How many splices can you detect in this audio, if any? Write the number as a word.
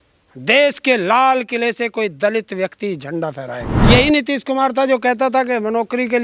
one